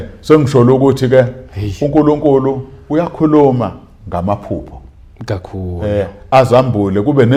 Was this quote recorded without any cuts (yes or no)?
yes